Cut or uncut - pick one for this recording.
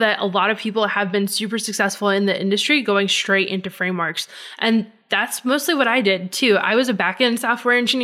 uncut